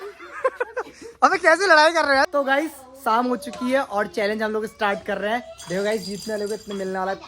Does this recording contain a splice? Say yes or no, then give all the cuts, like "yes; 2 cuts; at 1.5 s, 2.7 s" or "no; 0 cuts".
yes; 1 cut; at 2.3 s